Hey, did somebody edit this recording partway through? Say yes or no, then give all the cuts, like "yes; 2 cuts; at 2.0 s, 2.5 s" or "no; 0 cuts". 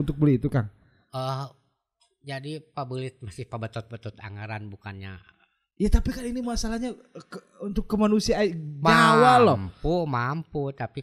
no; 0 cuts